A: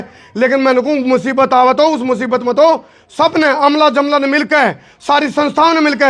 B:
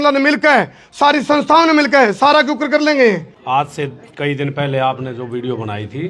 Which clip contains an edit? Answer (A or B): B